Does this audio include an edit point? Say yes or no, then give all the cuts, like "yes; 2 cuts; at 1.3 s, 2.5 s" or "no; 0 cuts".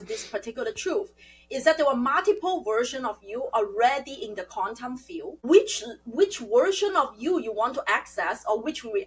yes; 1 cut; at 5.4 s